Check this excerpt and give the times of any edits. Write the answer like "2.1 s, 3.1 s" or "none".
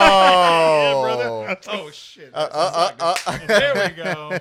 none